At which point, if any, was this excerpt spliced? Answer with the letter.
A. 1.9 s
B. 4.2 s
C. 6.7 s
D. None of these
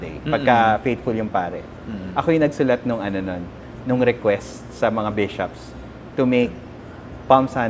D